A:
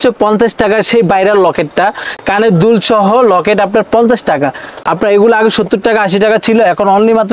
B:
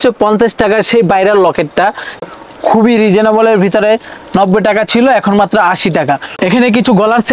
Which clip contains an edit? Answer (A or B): B